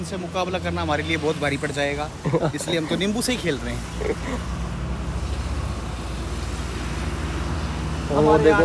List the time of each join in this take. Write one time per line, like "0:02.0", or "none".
none